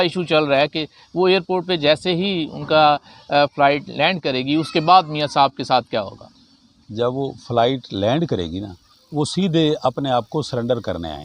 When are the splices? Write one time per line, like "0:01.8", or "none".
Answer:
none